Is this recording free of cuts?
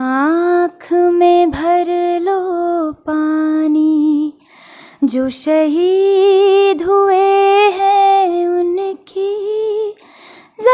yes; 0 cuts

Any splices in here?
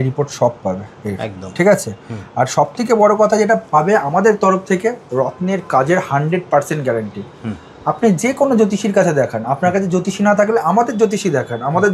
no; 0 cuts

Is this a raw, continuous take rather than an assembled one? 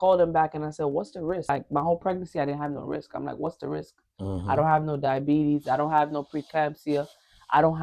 no; 1 cut; at 1.5 s

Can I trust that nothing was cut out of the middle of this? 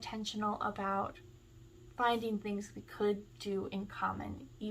yes; 0 cuts

